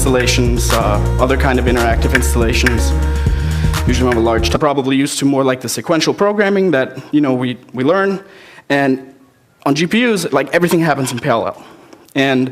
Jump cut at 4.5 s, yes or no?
no